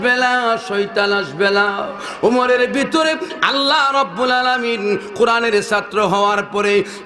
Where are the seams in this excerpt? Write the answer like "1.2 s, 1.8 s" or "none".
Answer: none